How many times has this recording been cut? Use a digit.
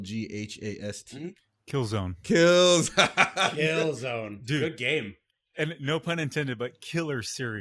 0